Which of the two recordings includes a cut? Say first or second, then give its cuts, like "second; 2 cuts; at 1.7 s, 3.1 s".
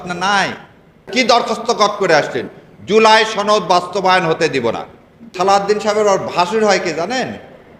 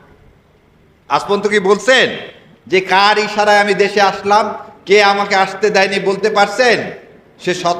first; 2 cuts; at 1.1 s, 5.3 s